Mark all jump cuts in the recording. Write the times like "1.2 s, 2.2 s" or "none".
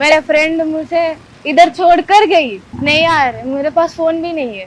2.6 s

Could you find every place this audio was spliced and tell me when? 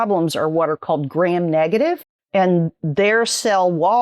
2.1 s

